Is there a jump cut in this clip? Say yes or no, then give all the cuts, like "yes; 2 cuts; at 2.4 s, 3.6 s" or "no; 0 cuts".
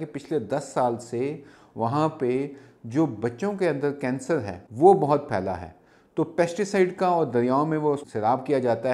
yes; 2 cuts; at 4.6 s, 8.0 s